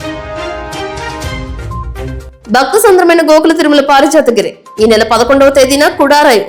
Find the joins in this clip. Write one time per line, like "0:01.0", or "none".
none